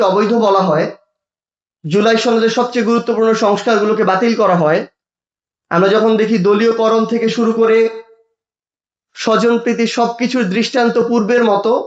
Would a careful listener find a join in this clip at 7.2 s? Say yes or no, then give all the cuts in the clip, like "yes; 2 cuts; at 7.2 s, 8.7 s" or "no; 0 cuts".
no; 0 cuts